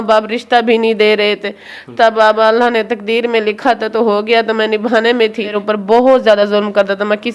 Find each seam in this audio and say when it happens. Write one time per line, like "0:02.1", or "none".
0:05.4